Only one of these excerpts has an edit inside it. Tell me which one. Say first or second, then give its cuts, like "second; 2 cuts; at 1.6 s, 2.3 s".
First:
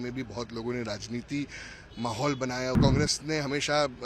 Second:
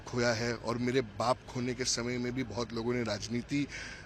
first; 1 cut; at 2.8 s